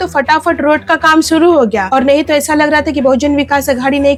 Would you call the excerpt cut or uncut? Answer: uncut